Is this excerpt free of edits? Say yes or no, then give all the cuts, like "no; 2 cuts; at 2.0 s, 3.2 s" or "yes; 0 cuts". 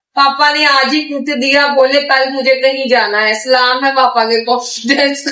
yes; 0 cuts